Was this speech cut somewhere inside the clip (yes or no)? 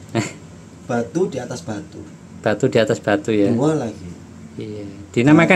no